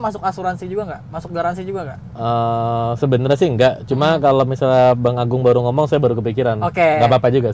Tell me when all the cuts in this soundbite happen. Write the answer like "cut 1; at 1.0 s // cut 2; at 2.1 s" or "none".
none